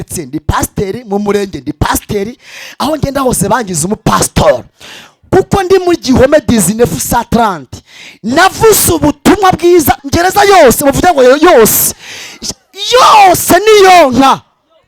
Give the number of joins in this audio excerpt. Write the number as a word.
one